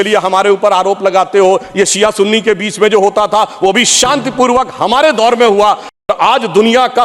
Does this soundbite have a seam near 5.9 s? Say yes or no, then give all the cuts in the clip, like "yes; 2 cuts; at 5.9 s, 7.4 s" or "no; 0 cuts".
yes; 1 cut; at 5.9 s